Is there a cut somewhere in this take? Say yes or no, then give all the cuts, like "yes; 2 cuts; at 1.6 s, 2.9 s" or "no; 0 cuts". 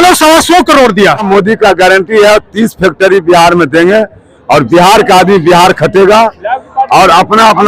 yes; 1 cut; at 1.3 s